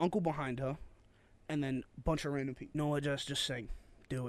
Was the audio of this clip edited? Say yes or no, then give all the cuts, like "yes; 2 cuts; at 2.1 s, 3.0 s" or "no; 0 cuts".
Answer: yes; 1 cut; at 2.7 s